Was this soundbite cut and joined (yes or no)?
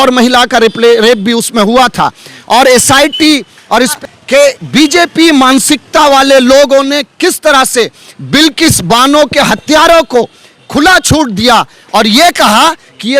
yes